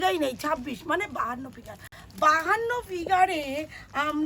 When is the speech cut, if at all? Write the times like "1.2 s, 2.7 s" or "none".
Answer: none

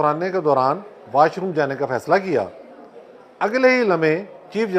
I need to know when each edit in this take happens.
none

